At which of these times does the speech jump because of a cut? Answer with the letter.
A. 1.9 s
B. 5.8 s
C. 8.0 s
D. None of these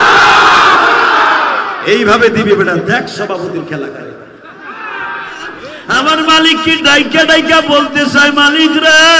B